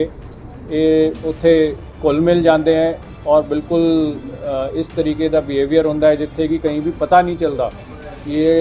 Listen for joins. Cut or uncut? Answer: uncut